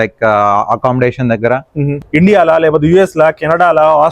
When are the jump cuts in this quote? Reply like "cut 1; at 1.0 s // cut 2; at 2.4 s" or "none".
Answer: cut 1; at 2.0 s